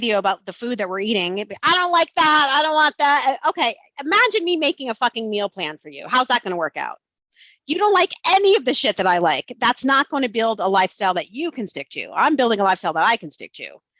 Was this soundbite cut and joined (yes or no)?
no